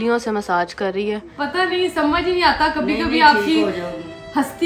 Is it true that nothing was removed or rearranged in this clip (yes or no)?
no